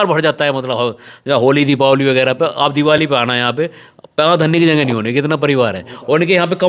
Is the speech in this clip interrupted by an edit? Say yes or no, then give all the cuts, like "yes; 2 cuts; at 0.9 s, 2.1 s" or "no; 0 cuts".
no; 0 cuts